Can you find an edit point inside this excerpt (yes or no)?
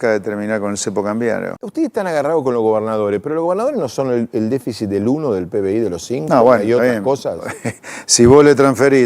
yes